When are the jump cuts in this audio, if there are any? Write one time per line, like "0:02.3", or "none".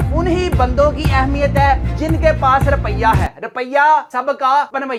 none